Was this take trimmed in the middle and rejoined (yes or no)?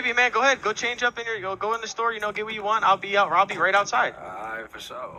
no